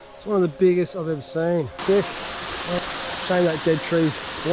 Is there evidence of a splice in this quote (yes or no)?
yes